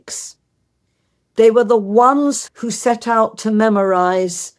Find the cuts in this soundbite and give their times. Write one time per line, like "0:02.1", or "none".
0:02.5